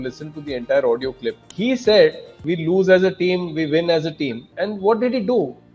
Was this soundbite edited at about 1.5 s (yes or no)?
yes